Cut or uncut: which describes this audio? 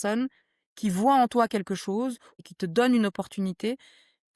cut